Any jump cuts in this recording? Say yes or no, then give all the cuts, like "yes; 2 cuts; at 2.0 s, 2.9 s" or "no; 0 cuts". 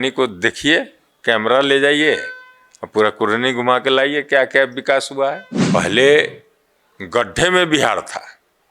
yes; 1 cut; at 5.5 s